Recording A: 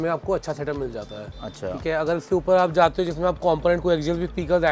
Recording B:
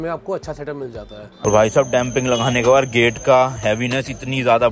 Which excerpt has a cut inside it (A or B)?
B